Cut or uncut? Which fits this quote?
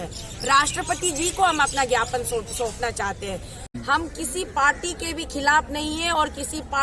cut